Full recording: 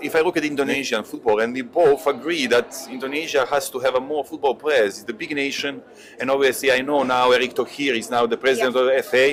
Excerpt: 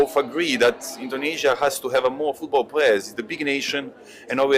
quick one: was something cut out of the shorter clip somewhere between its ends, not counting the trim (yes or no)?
no